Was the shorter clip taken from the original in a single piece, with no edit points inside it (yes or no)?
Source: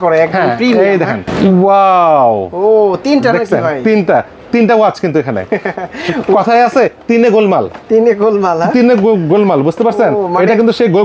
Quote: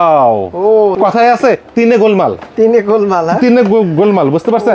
no